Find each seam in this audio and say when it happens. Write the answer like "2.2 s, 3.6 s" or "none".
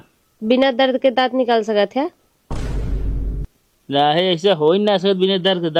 none